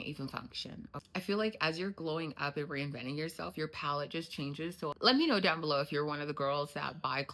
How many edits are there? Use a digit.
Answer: 2